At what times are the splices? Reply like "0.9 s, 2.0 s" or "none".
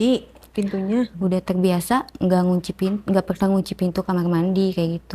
1.1 s